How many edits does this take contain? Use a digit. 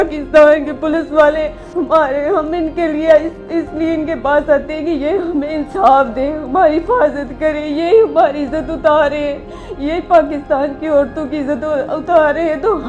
1